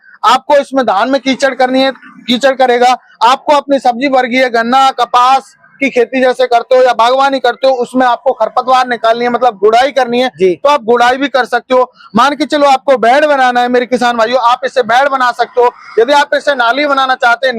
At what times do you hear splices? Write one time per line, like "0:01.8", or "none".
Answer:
none